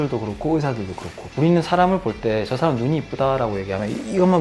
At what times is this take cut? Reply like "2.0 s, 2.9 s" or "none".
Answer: 1.2 s